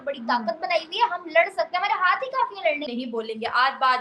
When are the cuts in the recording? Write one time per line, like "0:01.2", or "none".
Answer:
0:02.9